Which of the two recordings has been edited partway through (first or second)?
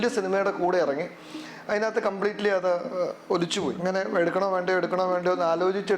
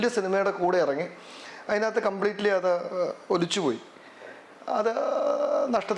first